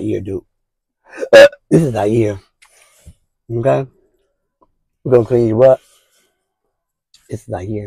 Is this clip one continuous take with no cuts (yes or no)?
yes